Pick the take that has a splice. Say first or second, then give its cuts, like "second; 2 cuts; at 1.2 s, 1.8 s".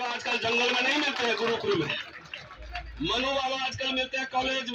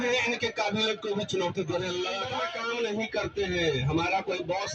second; 1 cut; at 2.4 s